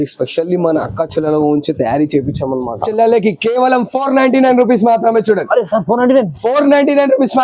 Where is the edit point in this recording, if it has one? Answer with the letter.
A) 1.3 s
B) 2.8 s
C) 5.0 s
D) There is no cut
B